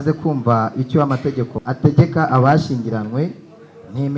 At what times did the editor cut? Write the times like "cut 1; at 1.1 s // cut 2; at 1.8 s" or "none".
cut 1; at 1.6 s